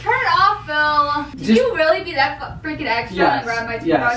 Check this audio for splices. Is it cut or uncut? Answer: cut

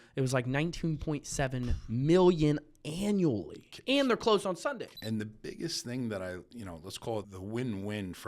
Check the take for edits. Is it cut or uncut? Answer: cut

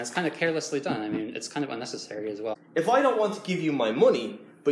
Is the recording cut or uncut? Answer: cut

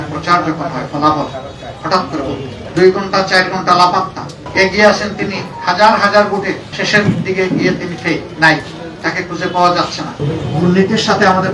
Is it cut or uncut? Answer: cut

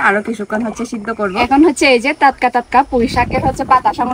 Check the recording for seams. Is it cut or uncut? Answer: cut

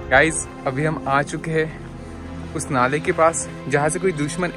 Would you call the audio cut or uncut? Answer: uncut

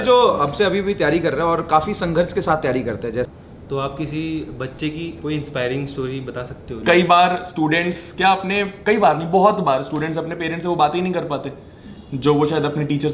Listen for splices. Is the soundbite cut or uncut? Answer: cut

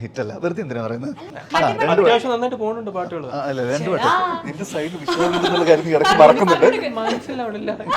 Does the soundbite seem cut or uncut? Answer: cut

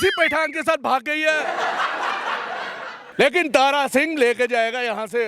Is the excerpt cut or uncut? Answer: cut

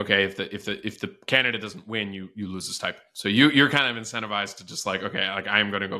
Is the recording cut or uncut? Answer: uncut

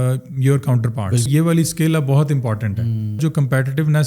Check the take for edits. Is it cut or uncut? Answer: cut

